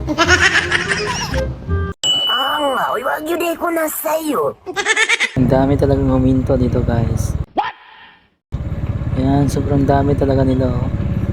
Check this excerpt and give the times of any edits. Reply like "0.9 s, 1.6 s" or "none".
5.3 s

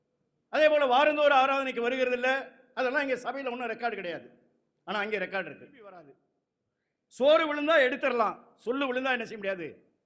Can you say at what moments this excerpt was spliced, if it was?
5.9 s

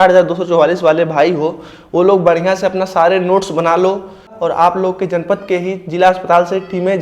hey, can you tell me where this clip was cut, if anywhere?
4.3 s

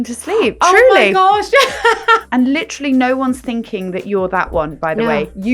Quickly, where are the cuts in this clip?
2.2 s

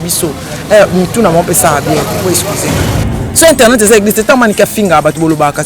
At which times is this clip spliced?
3.0 s

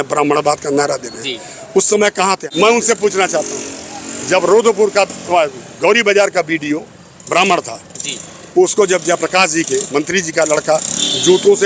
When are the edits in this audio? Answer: 2.4 s

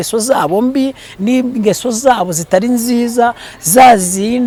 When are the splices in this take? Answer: none

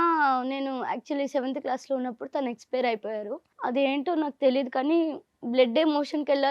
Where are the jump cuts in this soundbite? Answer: 3.4 s

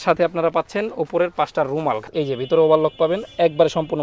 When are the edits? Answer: 2.1 s

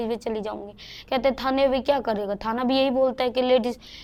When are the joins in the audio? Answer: none

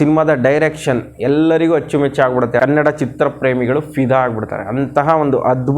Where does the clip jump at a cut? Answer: 2.6 s

